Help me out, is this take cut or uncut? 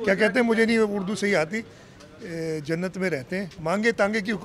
cut